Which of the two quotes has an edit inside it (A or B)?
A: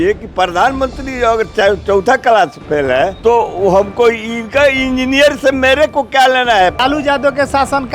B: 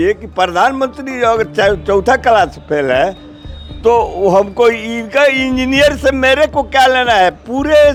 A